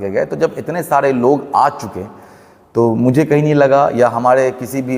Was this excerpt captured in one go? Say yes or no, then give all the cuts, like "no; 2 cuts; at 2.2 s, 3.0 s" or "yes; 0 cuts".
yes; 0 cuts